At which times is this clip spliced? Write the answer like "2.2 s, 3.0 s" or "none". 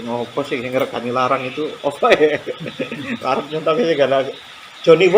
none